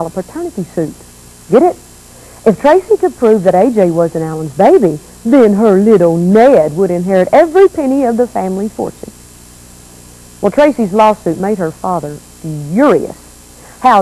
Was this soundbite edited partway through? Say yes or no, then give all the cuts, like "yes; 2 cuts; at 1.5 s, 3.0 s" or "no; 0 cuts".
yes; 1 cut; at 8.2 s